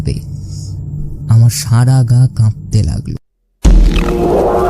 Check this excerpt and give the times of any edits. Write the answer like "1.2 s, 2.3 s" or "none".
3.3 s

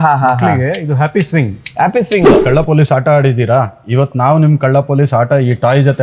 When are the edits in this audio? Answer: 2.4 s

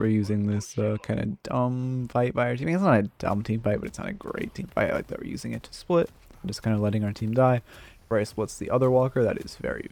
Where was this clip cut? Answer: none

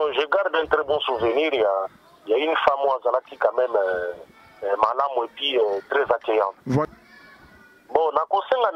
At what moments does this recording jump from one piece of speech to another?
6.9 s

